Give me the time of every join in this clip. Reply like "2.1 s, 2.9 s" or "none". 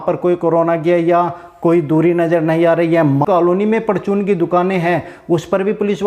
3.2 s